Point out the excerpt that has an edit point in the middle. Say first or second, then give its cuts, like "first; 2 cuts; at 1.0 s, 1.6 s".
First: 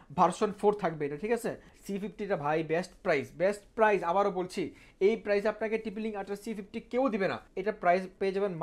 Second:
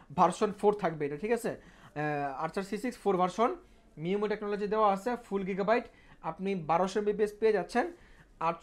first; 2 cuts; at 1.7 s, 7.5 s